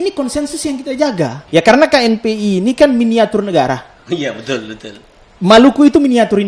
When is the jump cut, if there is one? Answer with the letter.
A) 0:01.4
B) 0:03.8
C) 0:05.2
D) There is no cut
A